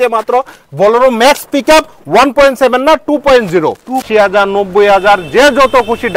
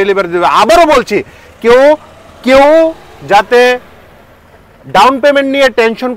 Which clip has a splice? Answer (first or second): first